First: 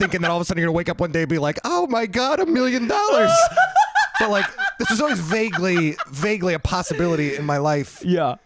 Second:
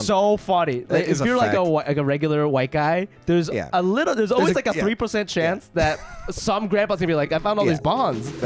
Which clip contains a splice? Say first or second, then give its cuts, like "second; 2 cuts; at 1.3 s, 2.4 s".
second; 1 cut; at 7.3 s